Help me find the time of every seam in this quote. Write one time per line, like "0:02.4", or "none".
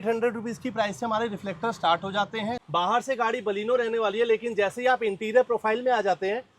0:02.6